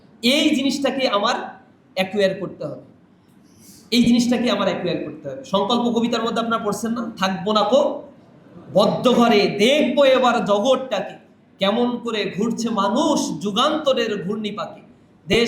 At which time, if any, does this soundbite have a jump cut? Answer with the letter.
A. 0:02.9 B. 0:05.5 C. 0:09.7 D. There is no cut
D